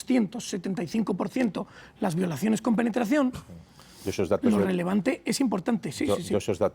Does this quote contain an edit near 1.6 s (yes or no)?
no